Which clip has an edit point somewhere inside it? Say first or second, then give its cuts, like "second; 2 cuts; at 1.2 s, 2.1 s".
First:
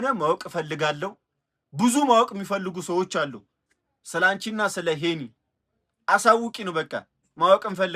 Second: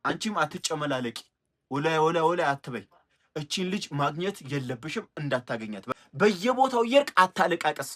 second; 1 cut; at 5.9 s